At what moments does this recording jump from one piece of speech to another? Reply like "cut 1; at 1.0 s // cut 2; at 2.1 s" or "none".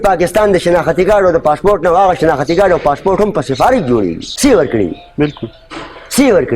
cut 1; at 4.2 s